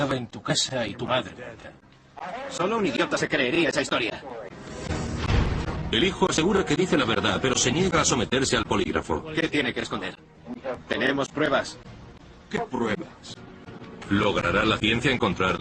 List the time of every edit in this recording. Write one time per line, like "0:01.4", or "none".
0:07.2

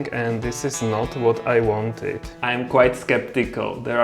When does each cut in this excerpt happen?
0:02.3

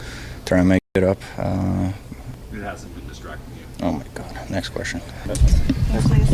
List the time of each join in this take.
0:02.3
0:05.3

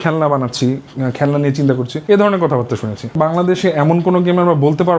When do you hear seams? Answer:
0:03.1

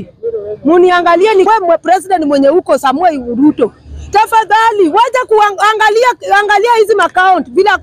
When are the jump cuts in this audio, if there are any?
0:01.5

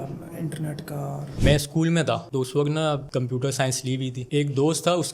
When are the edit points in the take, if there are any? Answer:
0:01.4
0:04.3

